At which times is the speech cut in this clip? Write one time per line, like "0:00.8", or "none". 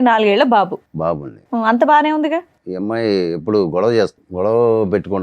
0:02.6
0:04.2